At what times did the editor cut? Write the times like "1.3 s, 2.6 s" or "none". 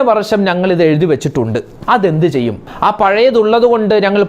1.7 s, 2.6 s